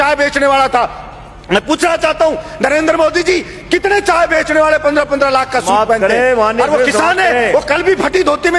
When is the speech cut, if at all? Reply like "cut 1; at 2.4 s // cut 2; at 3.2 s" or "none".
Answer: none